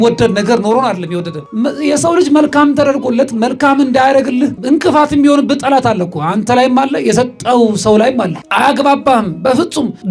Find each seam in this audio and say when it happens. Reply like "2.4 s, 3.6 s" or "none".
1.4 s